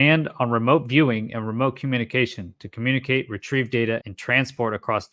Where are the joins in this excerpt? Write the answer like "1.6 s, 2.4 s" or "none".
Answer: 4.1 s